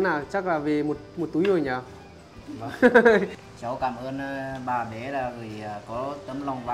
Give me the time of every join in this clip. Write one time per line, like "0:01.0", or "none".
0:03.3